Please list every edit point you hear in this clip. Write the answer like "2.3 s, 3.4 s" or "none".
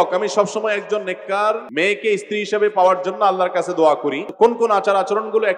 1.7 s, 4.3 s